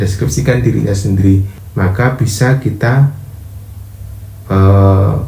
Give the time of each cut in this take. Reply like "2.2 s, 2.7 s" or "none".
1.6 s

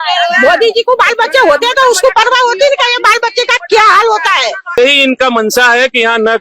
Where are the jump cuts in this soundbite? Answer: 4.8 s

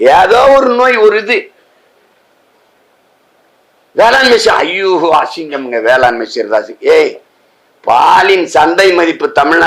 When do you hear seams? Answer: none

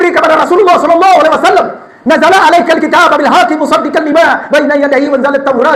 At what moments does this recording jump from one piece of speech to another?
none

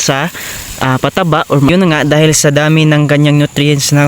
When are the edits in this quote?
1.7 s

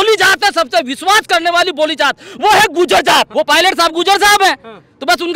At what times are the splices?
3.3 s

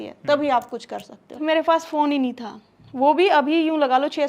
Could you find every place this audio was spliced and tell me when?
1.4 s

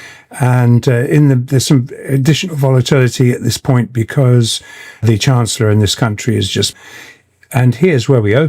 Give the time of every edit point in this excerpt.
6.7 s

